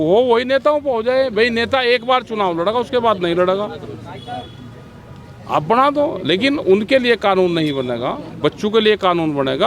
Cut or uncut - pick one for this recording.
uncut